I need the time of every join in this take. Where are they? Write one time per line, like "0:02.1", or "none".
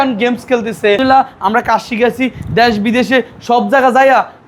0:01.0